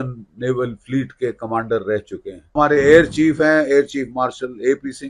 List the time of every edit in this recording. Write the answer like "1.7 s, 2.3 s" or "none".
2.5 s